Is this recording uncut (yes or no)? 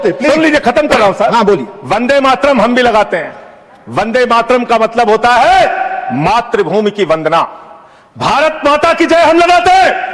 yes